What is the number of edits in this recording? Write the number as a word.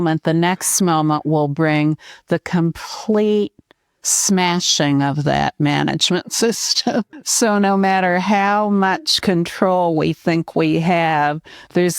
one